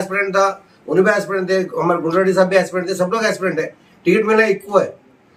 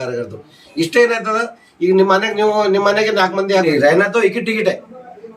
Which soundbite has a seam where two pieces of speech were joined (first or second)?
second